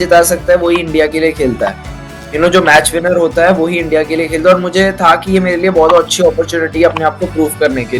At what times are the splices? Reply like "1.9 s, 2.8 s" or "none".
none